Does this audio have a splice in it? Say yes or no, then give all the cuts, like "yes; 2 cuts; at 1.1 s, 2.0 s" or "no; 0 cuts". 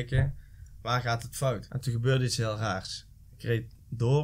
yes; 1 cut; at 1.7 s